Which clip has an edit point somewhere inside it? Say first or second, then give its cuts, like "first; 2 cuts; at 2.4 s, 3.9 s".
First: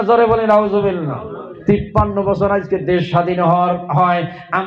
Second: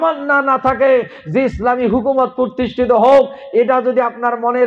first; 1 cut; at 1.5 s